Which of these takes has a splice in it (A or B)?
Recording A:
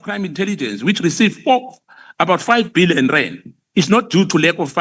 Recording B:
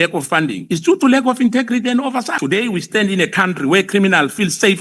B